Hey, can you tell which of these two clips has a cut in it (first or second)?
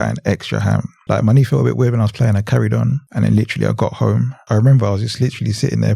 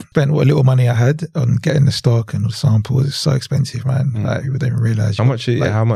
first